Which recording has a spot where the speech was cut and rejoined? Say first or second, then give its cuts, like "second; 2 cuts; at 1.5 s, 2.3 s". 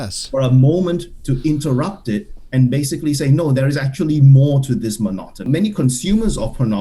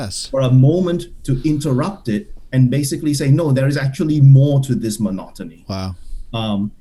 first; 1 cut; at 5.4 s